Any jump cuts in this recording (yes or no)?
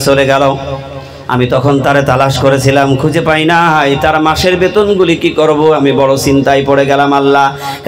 no